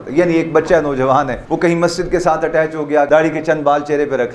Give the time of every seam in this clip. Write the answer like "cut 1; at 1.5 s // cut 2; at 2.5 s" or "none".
cut 1; at 1.4 s // cut 2; at 3.1 s

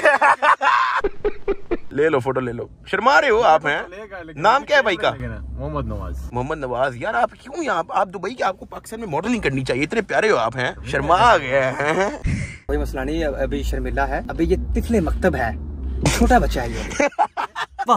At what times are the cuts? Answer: none

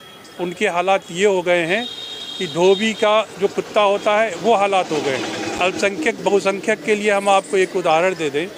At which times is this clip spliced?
none

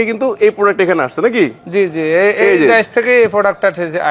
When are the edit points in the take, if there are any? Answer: none

